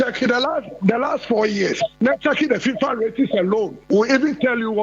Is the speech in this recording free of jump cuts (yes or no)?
no